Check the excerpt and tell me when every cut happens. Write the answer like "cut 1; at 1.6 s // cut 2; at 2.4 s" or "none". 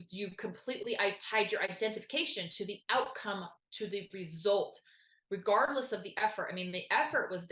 cut 1; at 1.7 s